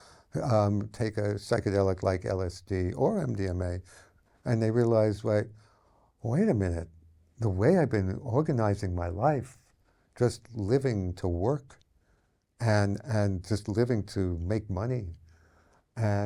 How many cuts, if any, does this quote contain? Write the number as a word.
zero